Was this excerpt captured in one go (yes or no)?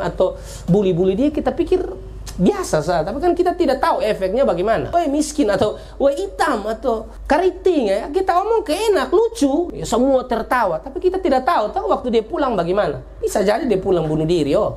no